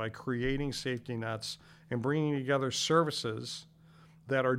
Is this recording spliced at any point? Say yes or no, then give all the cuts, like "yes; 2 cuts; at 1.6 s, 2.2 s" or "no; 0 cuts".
no; 0 cuts